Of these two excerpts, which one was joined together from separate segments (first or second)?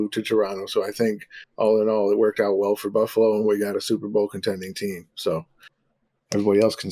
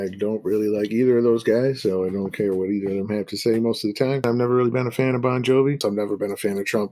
second